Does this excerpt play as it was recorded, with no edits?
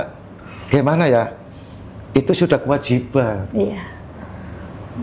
yes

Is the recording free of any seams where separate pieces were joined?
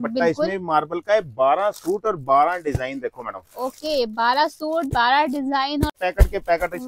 no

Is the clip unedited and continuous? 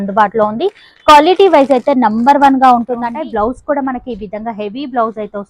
no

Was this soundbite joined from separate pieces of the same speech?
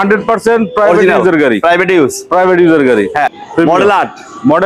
yes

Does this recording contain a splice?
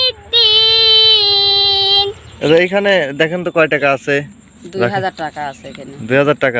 yes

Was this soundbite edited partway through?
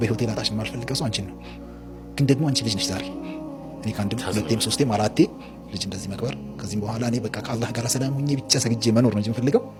no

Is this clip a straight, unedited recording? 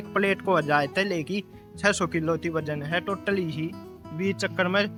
yes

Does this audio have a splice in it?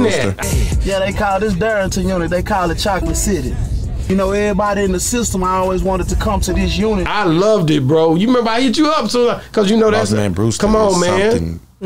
no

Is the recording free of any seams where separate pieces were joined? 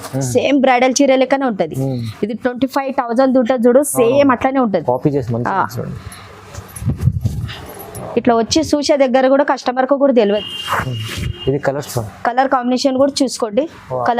no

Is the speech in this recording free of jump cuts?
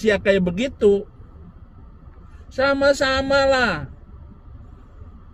yes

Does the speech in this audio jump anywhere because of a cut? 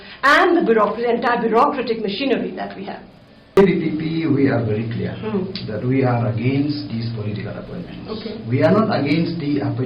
yes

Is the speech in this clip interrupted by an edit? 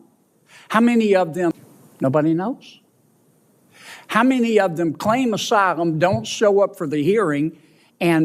yes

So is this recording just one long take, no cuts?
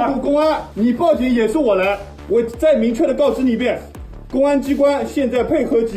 no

